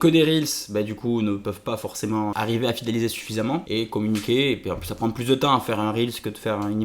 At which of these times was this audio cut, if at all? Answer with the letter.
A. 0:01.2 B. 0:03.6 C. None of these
C